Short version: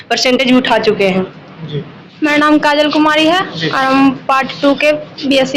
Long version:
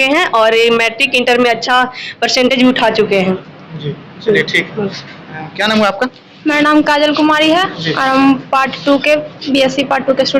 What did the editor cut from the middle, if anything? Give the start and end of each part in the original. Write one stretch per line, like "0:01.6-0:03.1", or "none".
0:04.1-0:06.2